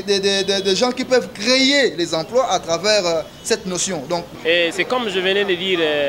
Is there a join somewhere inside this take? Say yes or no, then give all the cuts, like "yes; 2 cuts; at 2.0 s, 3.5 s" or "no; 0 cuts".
yes; 1 cut; at 4.3 s